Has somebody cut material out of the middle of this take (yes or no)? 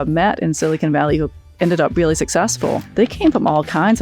yes